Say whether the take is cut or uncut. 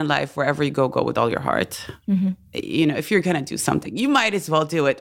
uncut